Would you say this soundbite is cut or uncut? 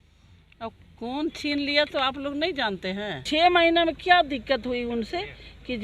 cut